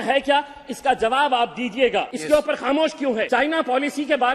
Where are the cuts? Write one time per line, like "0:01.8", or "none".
0:02.1
0:03.3